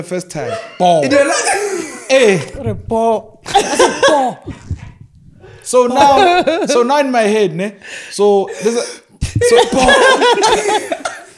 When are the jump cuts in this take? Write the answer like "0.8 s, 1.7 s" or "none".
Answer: none